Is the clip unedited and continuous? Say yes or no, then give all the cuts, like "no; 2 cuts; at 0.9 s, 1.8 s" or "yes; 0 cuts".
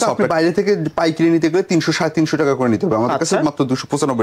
yes; 0 cuts